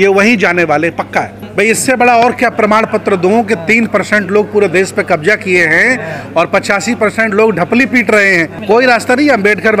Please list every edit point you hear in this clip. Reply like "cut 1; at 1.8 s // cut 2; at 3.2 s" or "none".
cut 1; at 1.4 s // cut 2; at 8.6 s